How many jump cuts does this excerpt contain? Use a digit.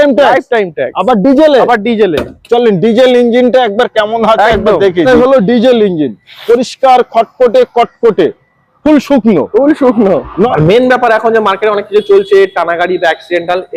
2